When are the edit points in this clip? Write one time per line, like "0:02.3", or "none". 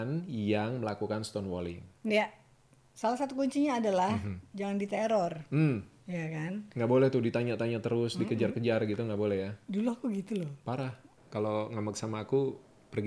0:11.1